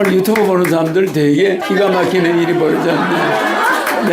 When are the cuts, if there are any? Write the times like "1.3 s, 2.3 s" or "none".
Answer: 1.6 s